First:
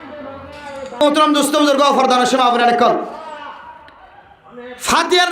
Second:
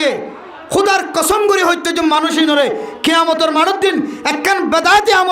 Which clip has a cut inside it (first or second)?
first